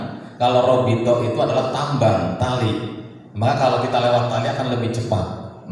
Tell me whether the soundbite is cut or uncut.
uncut